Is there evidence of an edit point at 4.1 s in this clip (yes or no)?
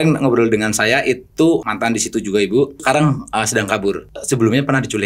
yes